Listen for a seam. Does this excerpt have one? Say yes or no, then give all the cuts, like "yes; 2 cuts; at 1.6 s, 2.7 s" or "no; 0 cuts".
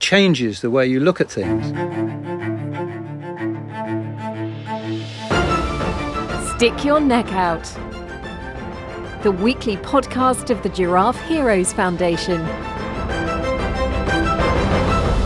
yes; 1 cut; at 1.5 s